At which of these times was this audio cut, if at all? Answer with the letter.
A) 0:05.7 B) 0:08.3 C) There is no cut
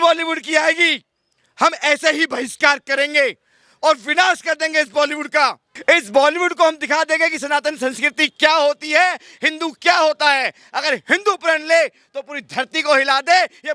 A